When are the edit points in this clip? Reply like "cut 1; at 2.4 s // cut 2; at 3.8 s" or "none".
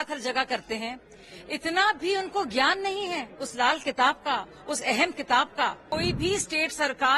cut 1; at 5.8 s